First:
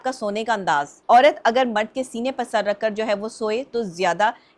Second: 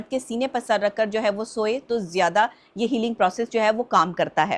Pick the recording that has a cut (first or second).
first